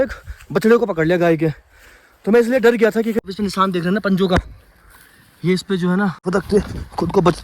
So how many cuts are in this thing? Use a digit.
2